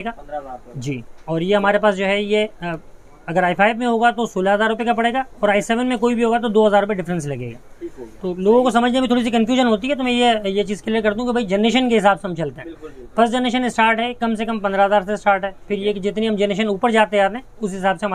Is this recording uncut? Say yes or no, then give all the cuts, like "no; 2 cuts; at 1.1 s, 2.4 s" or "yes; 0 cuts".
yes; 0 cuts